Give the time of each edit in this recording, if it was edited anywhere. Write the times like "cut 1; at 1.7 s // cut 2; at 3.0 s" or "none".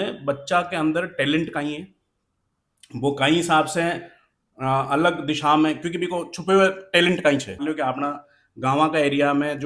cut 1; at 7.6 s